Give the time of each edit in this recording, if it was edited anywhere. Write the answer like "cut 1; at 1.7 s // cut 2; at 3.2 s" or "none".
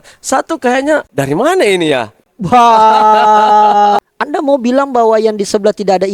cut 1; at 1.1 s // cut 2; at 4.0 s